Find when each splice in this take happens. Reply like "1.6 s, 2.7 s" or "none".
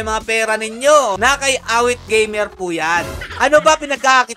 1.2 s, 3.2 s